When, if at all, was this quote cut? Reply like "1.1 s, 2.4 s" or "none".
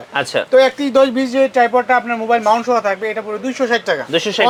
none